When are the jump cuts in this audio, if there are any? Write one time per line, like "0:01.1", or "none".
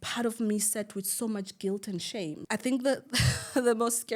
0:02.4